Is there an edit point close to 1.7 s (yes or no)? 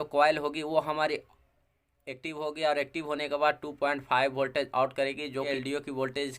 no